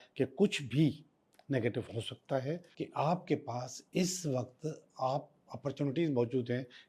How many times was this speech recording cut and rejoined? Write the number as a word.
one